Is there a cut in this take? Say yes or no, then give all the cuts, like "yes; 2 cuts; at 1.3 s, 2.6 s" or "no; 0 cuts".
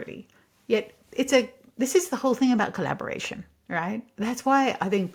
no; 0 cuts